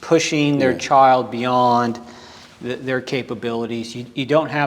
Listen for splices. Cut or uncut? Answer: uncut